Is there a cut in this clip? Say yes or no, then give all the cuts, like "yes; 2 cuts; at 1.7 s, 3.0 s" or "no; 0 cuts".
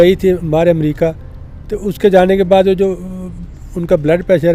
no; 0 cuts